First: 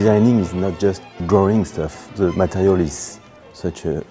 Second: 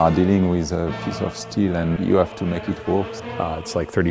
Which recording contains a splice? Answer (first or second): second